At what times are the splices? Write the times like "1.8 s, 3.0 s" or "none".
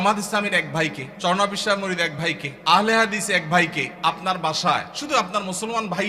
1.1 s, 2.5 s, 3.9 s, 4.9 s

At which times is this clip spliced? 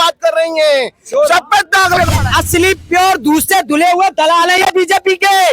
2.1 s

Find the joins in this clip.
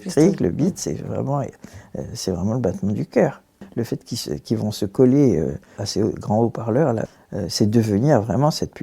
3.7 s, 5.8 s, 7.1 s

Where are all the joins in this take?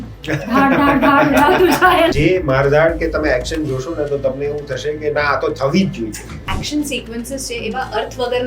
2.1 s, 6.4 s

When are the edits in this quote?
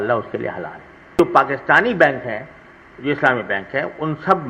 1.2 s

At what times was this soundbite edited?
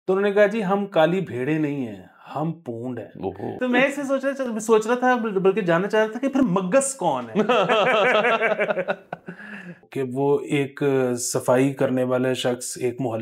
3.5 s, 9.8 s

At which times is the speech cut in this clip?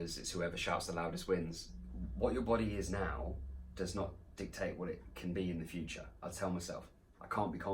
1.6 s, 6.2 s

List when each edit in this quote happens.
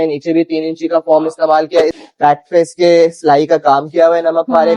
2.0 s

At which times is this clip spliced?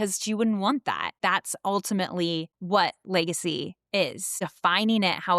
1.2 s, 2.5 s, 4.3 s

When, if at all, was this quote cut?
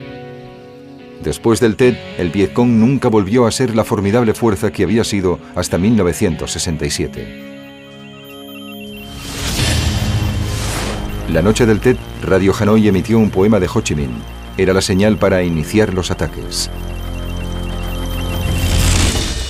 11.4 s

